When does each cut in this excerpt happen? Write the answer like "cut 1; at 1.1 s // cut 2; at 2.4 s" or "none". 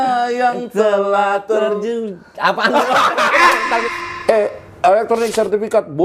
cut 1; at 3.8 s